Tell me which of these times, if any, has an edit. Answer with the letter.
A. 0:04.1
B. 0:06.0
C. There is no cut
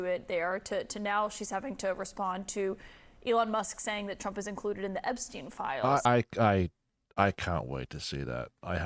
B